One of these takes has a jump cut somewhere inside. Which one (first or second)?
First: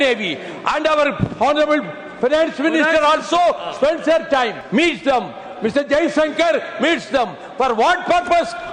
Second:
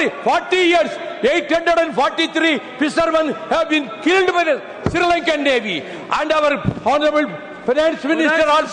first